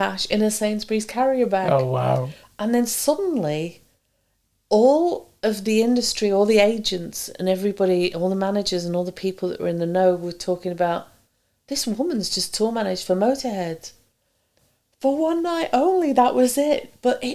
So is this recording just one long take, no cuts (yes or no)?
no